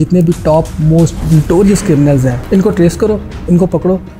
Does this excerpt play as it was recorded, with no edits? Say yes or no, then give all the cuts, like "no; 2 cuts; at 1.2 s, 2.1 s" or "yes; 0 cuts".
no; 2 cuts; at 1.2 s, 2.4 s